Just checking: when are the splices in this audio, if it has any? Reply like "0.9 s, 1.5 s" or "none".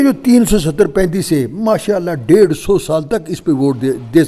none